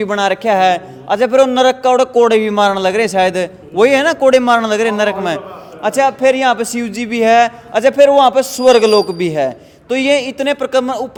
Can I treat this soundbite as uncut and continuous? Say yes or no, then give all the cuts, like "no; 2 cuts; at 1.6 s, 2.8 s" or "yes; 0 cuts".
yes; 0 cuts